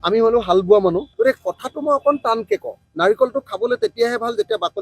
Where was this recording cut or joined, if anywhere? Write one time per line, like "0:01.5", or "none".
0:01.1
0:02.8